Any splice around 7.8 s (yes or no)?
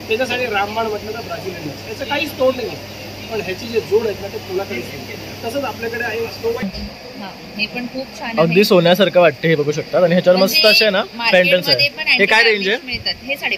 no